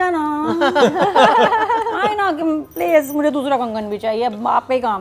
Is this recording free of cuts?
yes; 0 cuts

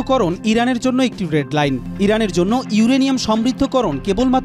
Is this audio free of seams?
no; 1 cut; at 1.9 s

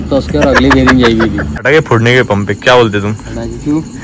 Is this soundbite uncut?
no; 1 cut; at 1.6 s

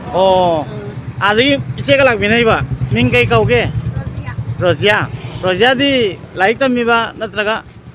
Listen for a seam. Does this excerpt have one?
no; 0 cuts

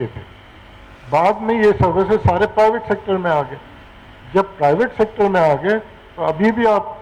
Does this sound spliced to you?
no; 0 cuts

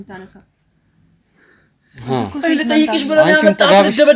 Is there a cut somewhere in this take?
no; 0 cuts

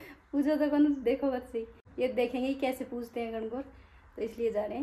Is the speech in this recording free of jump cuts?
yes; 0 cuts

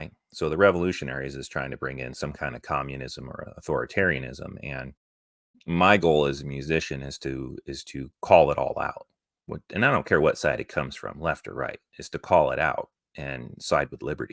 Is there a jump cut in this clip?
no; 0 cuts

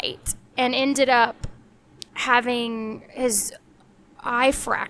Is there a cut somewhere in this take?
no; 0 cuts

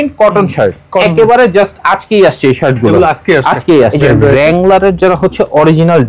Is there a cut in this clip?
yes; 2 cuts; at 0.9 s, 3.9 s

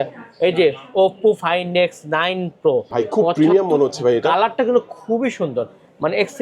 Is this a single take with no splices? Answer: no; 1 cut; at 2.9 s

